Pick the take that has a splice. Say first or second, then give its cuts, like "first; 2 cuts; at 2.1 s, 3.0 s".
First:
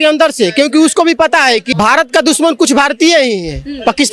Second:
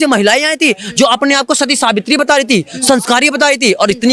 first; 1 cut; at 1.7 s